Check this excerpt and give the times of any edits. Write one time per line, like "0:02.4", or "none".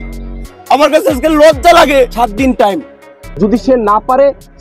0:03.2